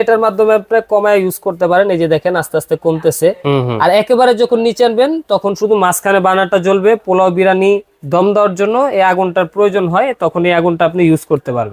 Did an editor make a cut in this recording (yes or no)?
no